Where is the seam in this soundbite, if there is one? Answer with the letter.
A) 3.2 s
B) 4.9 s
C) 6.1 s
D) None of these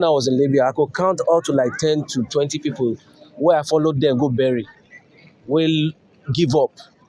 D